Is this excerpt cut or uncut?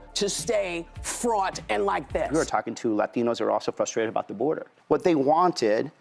cut